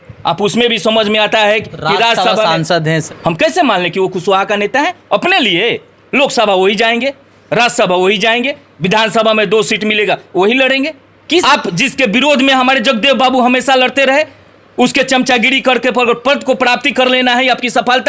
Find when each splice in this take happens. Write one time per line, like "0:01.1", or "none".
0:03.0
0:11.4